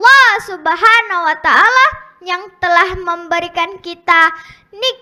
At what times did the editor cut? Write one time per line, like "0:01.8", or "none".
none